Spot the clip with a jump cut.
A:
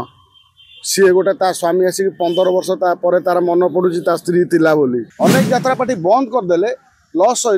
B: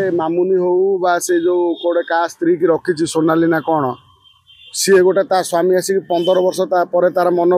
A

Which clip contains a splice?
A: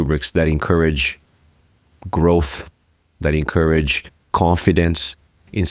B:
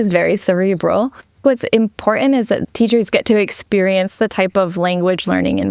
B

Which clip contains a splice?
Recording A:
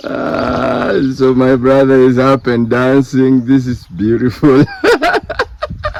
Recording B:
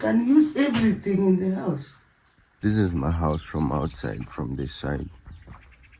B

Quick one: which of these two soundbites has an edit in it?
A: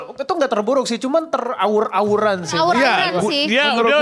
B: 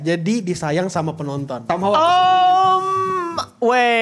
B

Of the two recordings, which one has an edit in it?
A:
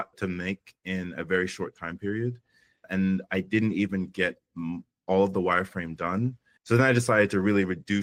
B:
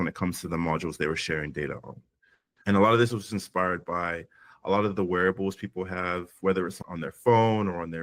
B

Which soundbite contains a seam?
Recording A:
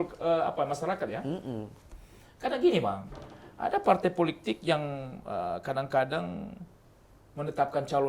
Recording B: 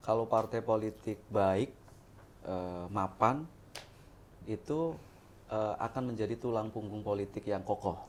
A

